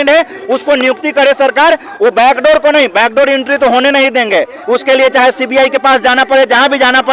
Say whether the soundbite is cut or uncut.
uncut